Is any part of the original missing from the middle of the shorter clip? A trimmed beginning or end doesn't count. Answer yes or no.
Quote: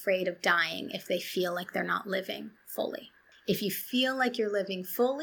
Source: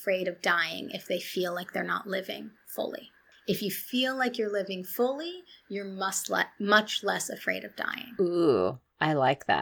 no